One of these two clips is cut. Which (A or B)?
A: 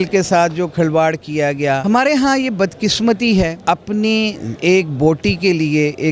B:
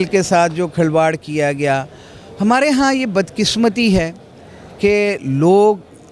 A